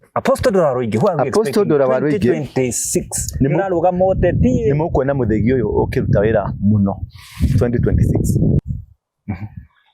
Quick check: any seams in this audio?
yes; 1 cut; at 8.6 s

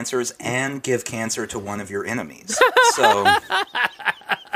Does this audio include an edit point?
no; 0 cuts

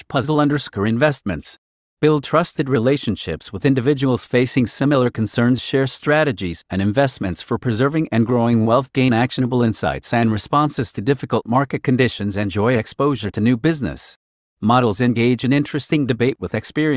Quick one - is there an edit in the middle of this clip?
yes; 1 cut; at 1.3 s

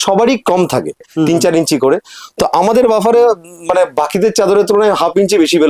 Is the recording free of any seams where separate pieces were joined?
no; 1 cut; at 1.1 s

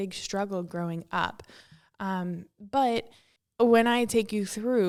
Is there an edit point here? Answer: no; 0 cuts

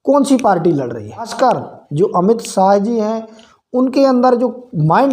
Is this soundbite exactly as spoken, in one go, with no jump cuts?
no; 1 cut; at 1.3 s

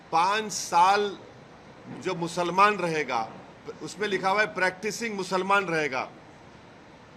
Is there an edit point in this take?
no; 0 cuts

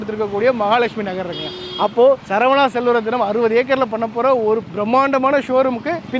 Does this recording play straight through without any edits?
yes; 0 cuts

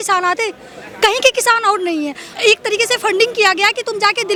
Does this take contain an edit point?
no; 0 cuts

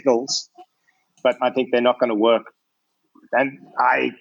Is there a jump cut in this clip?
yes; 1 cut; at 1.4 s

